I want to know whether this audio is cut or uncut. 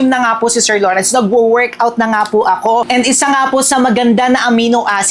uncut